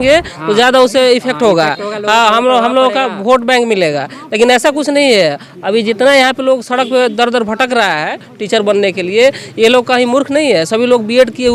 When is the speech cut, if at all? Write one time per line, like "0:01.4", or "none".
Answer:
none

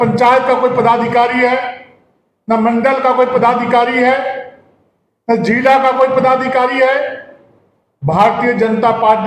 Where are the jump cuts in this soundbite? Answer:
none

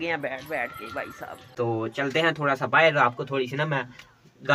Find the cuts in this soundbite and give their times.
0:01.4

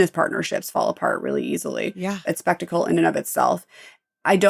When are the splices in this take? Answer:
0:02.2

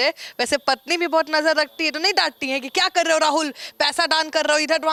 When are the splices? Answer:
none

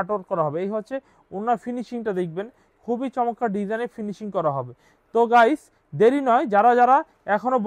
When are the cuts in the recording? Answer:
none

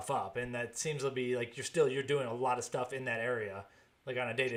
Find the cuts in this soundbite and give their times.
none

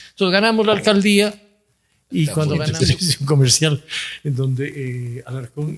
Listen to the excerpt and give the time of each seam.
0:02.7

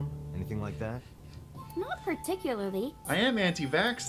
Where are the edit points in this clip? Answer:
0:03.0

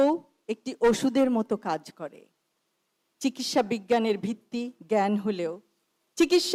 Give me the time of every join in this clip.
none

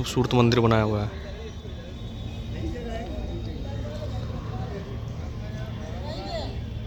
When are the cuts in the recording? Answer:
none

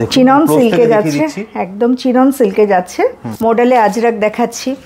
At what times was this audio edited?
0:03.3

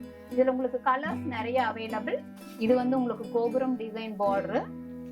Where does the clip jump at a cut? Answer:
0:02.3

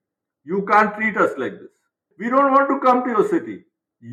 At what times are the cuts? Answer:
none

